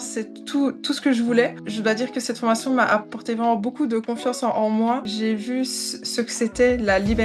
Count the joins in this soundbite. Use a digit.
2